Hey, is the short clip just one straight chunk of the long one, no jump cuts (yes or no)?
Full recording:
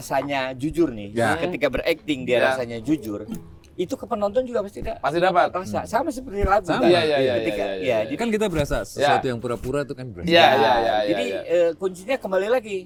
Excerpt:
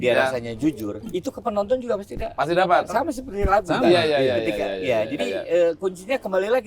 no